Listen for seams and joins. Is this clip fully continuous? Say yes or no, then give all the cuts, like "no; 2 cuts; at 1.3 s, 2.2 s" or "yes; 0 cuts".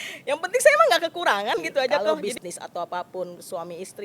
no; 1 cut; at 2.3 s